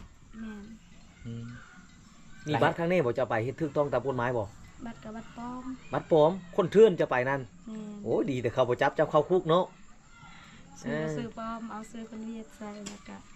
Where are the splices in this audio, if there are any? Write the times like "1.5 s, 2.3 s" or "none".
none